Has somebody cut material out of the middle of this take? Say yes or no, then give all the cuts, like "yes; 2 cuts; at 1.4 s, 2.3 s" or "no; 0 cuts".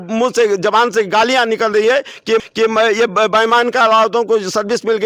no; 0 cuts